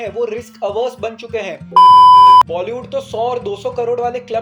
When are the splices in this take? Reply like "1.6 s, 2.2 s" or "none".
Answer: 1.6 s, 2.5 s

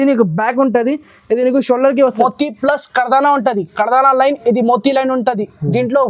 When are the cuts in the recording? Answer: 2.2 s

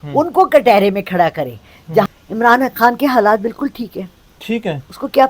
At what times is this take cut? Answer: 2.1 s

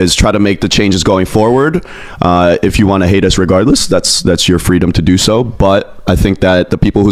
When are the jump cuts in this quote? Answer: none

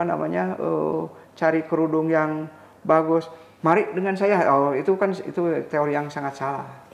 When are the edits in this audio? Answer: none

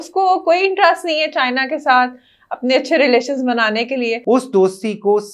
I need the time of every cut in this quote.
4.2 s

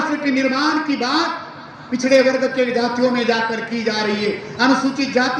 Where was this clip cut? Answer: none

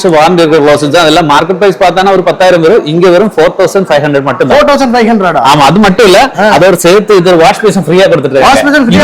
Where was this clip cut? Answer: none

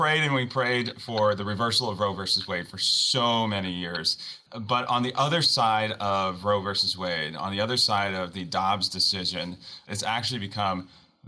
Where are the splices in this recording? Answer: 4.4 s, 9.9 s

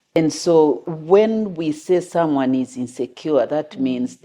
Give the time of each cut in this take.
0.9 s

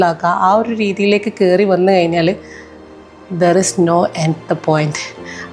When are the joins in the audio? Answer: none

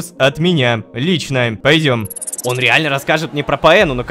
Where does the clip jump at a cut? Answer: 1.6 s, 2.2 s

